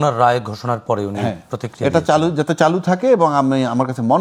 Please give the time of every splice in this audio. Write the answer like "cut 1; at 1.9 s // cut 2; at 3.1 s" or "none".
none